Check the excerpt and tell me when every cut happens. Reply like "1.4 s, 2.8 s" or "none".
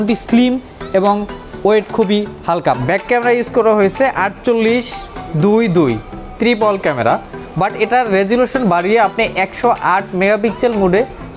2.8 s